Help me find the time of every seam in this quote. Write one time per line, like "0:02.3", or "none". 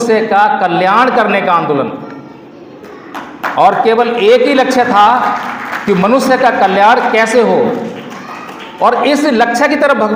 none